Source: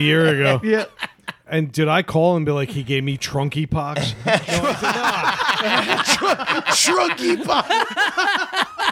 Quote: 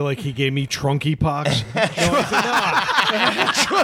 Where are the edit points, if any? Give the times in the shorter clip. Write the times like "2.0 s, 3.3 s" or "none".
none